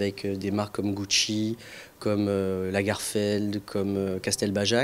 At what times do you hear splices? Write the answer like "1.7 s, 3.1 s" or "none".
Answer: 2.5 s